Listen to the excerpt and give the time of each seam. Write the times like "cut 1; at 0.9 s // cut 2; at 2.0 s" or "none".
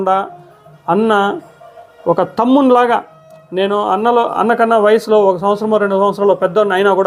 none